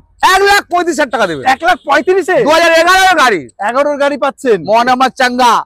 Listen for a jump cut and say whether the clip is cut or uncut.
uncut